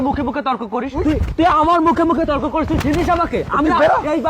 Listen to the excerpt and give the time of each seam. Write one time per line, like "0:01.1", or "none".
0:00.9

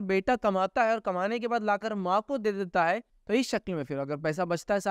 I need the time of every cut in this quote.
0:03.1

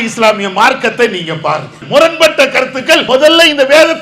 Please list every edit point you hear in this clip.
0:01.8
0:03.0

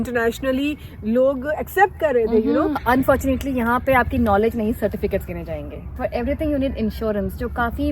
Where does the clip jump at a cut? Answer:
0:02.8
0:05.9

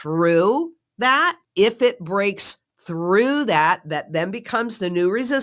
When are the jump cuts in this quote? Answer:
0:01.4

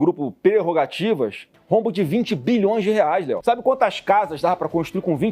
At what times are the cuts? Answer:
0:01.5
0:03.4

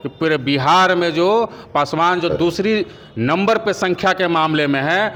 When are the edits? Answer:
none

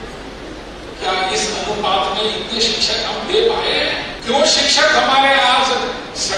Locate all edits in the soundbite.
0:04.1

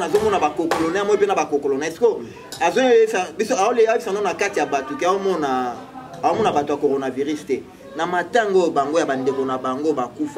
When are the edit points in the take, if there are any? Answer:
none

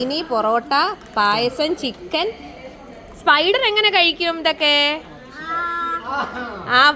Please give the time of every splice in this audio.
none

